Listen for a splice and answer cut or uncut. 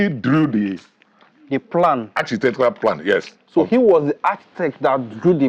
uncut